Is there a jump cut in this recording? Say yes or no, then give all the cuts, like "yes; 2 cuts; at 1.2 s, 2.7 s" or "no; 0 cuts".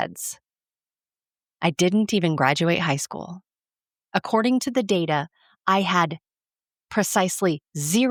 no; 0 cuts